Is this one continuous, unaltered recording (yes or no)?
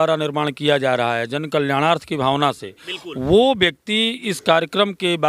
yes